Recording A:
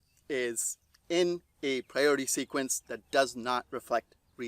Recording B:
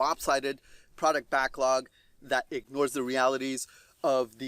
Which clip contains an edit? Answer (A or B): B